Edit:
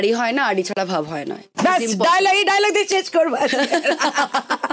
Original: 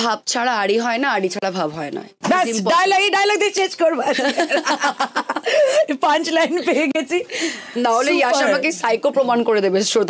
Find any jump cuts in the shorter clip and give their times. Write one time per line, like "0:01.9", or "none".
none